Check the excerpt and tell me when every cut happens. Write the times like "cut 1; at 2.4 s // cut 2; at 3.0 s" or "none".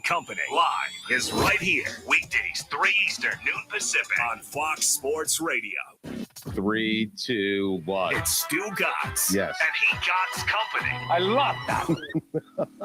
cut 1; at 5.9 s